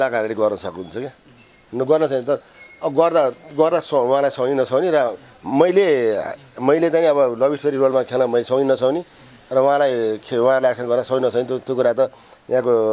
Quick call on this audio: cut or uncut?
uncut